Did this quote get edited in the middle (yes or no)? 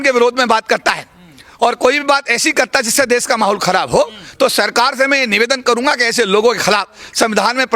no